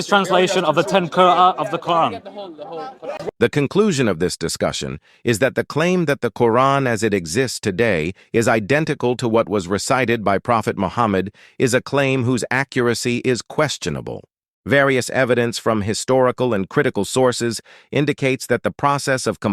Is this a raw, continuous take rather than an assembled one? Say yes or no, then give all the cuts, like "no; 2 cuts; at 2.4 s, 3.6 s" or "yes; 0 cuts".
no; 1 cut; at 3.2 s